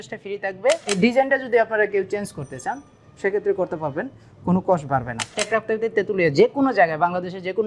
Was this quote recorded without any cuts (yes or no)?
no